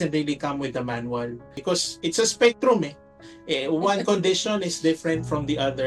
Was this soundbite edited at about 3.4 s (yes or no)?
no